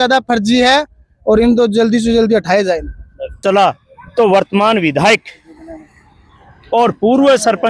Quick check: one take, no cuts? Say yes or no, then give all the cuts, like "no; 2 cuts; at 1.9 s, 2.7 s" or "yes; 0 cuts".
no; 1 cut; at 3.4 s